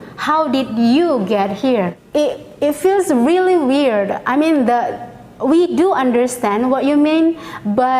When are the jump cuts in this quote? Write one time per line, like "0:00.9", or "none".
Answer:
0:02.0